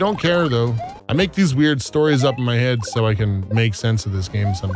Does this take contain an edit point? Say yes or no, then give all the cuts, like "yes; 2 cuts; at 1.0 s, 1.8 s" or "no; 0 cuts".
yes; 1 cut; at 0.9 s